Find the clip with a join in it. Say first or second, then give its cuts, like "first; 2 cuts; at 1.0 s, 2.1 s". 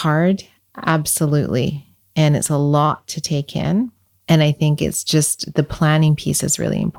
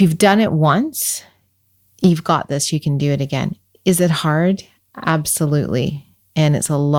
first; 1 cut; at 4.1 s